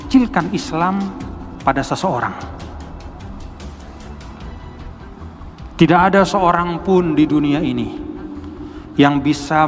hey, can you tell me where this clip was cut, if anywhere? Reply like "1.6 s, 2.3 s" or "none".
none